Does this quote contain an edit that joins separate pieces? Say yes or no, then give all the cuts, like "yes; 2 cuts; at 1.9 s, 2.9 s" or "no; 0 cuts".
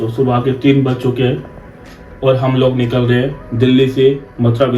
no; 0 cuts